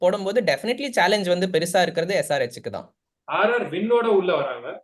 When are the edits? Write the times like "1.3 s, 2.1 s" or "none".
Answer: 3.1 s